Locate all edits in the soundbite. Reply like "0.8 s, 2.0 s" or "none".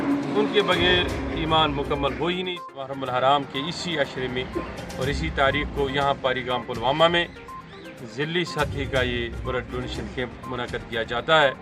2.9 s